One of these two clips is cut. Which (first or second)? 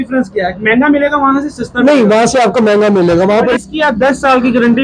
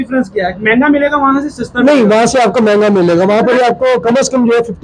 first